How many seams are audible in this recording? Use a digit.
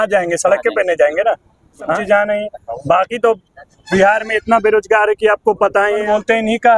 2